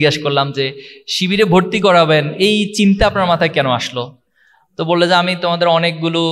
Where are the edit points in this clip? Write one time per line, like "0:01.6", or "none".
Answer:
none